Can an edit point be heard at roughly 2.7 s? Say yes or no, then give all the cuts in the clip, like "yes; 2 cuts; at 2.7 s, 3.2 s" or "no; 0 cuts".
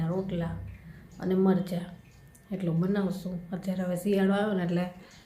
no; 0 cuts